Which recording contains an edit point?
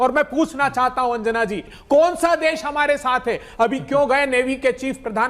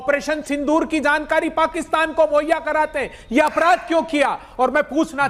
first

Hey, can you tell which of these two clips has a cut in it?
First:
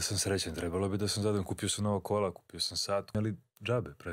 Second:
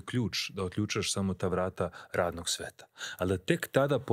first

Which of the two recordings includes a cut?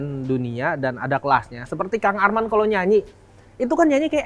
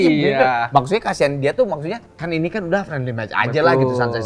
second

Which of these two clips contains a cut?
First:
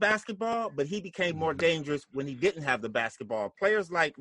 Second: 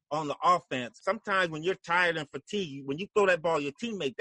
second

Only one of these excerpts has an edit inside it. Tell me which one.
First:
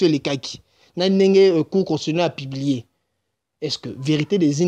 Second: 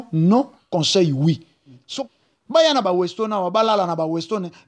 second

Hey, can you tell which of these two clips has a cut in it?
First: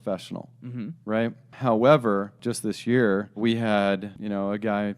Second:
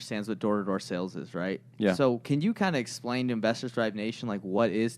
first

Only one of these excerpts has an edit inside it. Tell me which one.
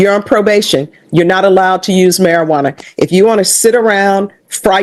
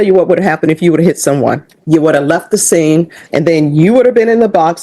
second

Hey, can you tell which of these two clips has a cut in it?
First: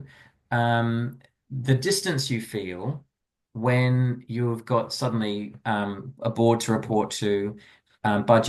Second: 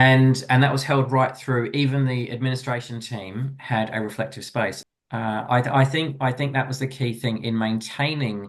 second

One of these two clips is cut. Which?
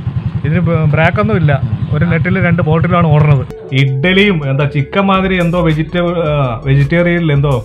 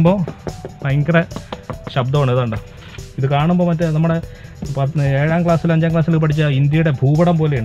first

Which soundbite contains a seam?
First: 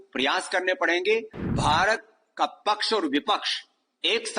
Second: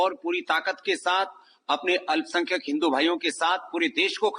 first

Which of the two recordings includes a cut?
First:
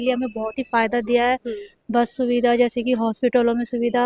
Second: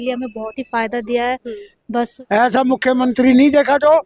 second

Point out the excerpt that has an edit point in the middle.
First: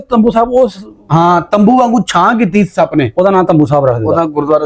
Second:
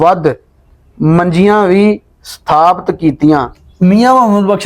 second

